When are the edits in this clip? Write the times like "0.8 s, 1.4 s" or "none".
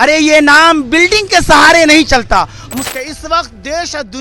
2.8 s